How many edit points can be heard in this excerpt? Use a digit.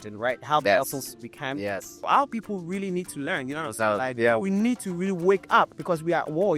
1